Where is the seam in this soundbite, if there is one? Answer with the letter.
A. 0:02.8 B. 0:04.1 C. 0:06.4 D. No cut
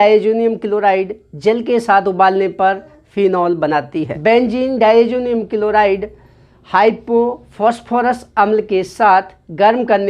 B